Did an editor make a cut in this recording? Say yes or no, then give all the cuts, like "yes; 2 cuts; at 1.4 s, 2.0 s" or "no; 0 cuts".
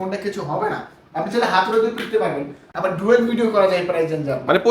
yes; 1 cut; at 2.6 s